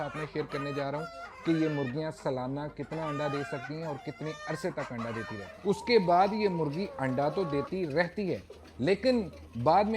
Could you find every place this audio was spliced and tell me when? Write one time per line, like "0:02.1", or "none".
0:05.5